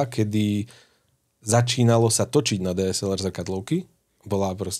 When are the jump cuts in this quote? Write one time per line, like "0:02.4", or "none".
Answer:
none